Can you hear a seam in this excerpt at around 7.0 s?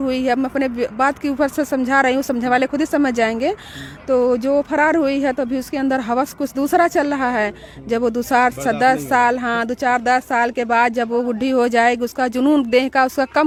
no; 0 cuts

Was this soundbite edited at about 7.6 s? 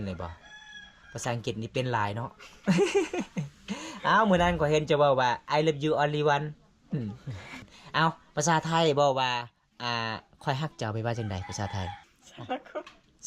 yes; 2 cuts; at 7.6 s, 12.1 s

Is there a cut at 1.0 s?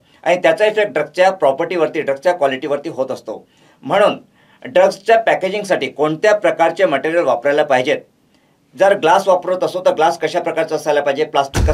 no; 0 cuts

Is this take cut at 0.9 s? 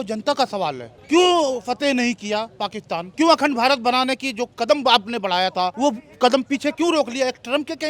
yes; 3 cuts; at 0.9 s, 3.1 s, 5.7 s

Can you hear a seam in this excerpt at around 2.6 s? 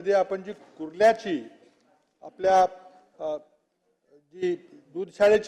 no; 0 cuts

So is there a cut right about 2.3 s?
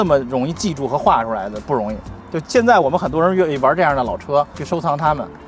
no; 1 cut; at 4.6 s

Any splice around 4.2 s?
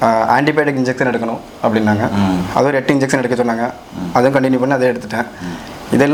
no; 0 cuts

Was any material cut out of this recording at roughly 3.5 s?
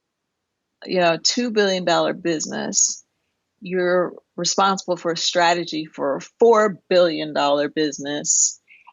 yes; 1 cut; at 3.5 s

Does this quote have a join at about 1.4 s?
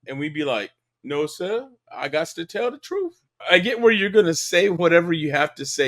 no; 1 cut; at 3.4 s

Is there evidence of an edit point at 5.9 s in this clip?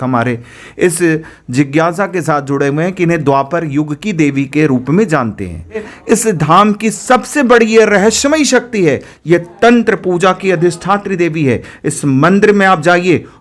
yes; 1 cut; at 5.9 s

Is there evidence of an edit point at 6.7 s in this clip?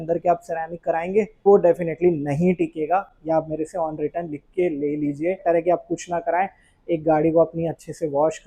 no; 2 cuts; at 1.5 s, 5.4 s

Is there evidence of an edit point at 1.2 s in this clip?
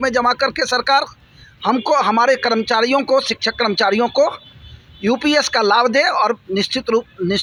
no; 0 cuts

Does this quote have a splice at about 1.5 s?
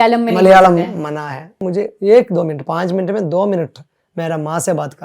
yes; 1 cut; at 1.5 s

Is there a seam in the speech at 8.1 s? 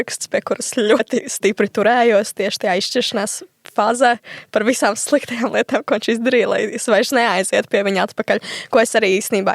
no; 1 cut; at 1.0 s

